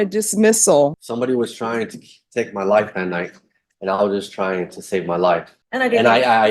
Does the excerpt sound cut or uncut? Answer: cut